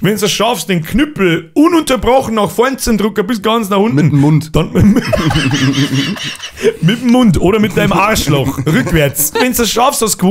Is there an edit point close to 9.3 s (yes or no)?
yes